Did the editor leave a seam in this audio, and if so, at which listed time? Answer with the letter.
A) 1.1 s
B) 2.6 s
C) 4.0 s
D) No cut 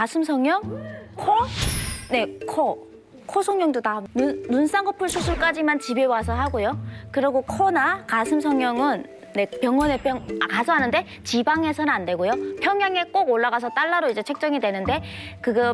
C